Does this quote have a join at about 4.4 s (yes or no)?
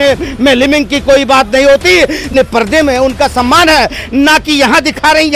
no